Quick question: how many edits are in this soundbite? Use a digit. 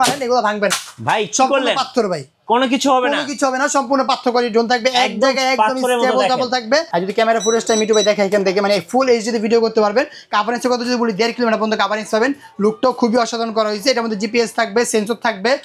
1